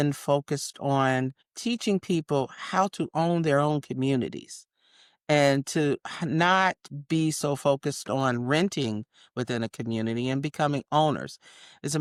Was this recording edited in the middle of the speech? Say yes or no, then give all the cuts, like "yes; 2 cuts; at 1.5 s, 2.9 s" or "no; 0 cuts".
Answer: no; 0 cuts